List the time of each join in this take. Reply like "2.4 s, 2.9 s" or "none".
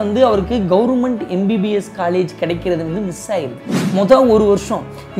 3.8 s